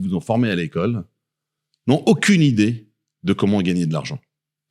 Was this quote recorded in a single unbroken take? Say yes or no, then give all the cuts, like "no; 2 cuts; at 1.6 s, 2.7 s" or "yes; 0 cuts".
yes; 0 cuts